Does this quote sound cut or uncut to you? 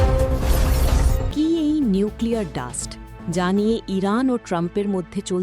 cut